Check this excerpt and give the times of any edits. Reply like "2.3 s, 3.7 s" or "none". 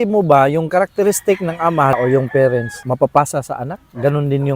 2.0 s, 2.7 s